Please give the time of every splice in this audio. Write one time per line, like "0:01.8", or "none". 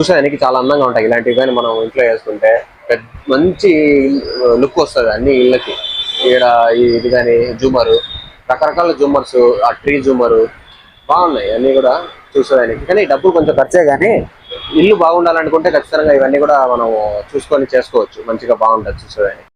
none